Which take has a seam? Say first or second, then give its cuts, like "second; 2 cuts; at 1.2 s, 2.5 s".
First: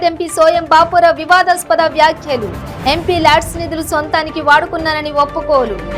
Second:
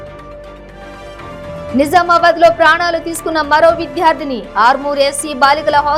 second; 1 cut; at 1.5 s